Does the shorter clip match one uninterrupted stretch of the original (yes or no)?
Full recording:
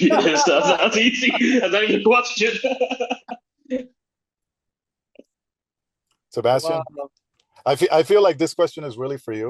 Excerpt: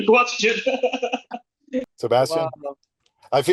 no